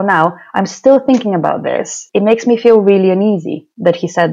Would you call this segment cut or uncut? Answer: cut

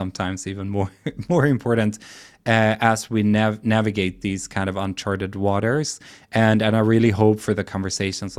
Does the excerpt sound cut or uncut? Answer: uncut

